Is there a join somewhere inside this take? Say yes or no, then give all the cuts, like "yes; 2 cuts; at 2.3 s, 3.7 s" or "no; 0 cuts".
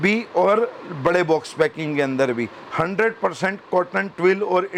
no; 0 cuts